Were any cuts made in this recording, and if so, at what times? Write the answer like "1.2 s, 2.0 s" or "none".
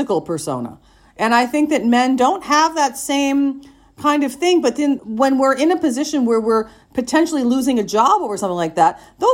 5.0 s